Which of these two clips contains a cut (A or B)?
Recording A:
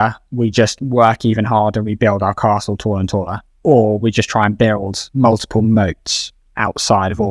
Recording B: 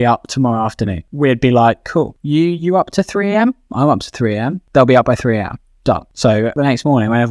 B